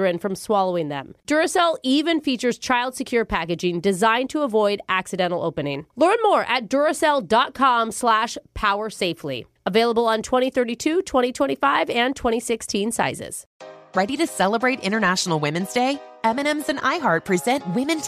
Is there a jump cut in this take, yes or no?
yes